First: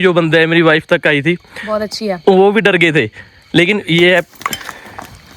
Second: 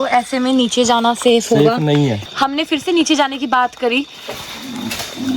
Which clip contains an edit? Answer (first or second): second